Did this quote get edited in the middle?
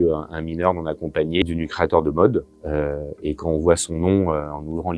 no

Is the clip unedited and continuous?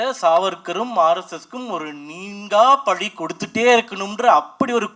yes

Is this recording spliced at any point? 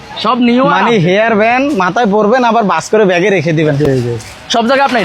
no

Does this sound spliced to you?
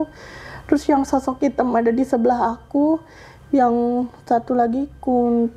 no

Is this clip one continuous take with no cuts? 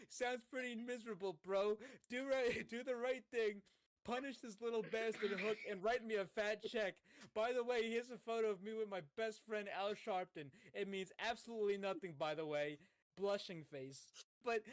yes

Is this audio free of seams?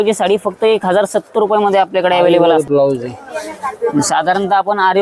no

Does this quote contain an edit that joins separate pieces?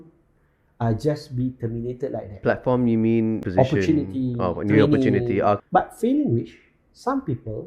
yes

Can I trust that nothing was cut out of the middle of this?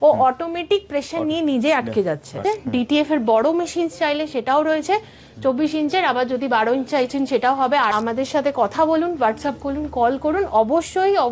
no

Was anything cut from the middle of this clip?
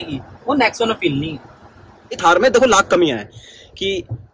yes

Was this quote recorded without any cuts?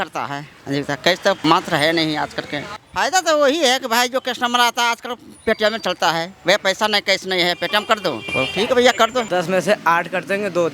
no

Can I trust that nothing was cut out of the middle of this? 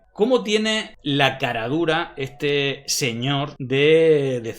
no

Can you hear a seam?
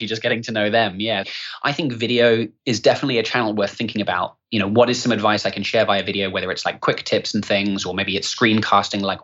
yes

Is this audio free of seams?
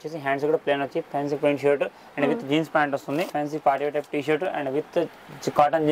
no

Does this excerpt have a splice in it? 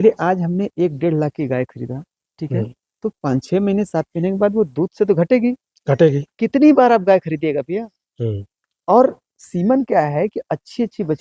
no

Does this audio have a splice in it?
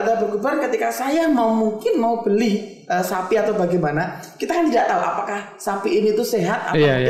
no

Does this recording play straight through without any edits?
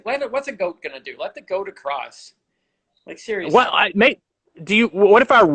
yes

